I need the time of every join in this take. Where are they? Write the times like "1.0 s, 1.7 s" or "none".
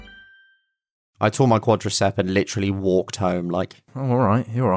1.4 s, 3.9 s